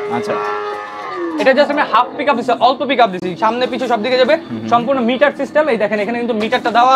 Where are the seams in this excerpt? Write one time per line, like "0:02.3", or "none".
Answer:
none